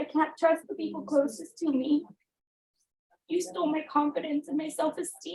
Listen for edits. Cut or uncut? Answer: uncut